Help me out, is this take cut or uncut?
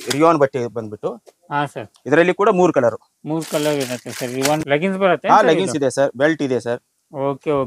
cut